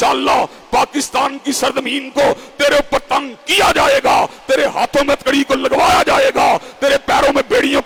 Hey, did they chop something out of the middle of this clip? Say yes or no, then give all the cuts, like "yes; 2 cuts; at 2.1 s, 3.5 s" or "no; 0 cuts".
no; 0 cuts